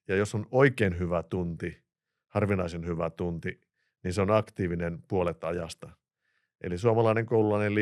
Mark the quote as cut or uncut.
uncut